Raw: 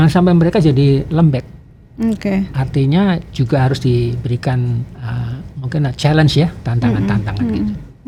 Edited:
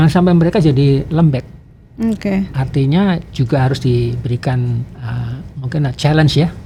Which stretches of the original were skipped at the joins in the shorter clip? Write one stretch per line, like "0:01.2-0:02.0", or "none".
none